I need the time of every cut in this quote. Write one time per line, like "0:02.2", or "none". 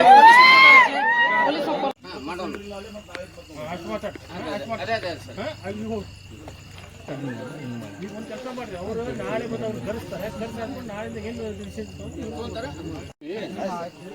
0:02.0
0:13.2